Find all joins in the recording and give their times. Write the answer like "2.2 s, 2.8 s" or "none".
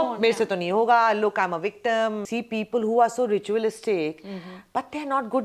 2.2 s